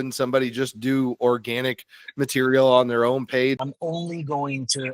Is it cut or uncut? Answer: cut